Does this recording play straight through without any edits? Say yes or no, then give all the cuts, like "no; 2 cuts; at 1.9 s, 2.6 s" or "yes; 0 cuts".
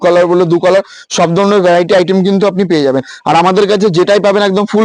yes; 0 cuts